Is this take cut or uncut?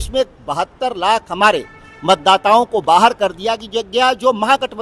uncut